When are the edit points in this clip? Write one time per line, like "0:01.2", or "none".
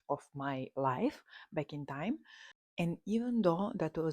none